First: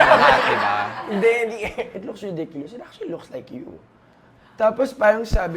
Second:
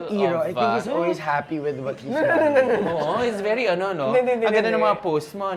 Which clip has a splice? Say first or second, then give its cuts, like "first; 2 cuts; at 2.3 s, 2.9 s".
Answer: first; 1 cut; at 1.9 s